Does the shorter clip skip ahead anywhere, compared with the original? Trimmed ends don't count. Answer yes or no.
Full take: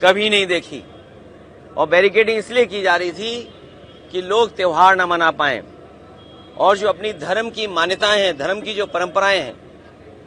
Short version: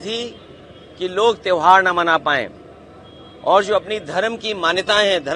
no